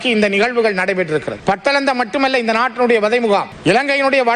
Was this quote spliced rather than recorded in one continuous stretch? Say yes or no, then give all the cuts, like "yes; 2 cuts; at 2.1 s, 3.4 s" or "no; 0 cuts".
no; 0 cuts